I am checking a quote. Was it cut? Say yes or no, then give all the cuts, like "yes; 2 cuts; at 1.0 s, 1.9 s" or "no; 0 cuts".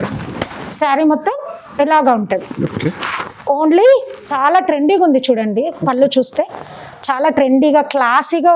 yes; 1 cut; at 4.2 s